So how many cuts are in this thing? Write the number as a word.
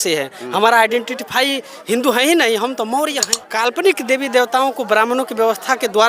one